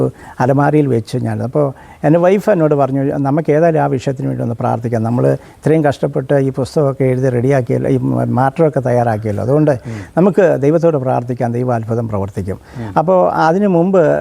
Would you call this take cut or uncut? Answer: uncut